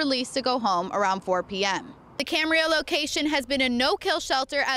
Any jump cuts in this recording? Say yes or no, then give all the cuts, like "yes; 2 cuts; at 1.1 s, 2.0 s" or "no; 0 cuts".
yes; 1 cut; at 2.0 s